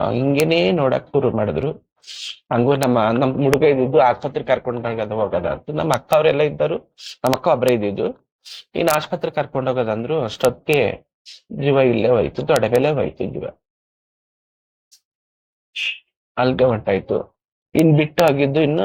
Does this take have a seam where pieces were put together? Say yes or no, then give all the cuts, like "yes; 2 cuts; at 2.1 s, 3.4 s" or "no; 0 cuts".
no; 0 cuts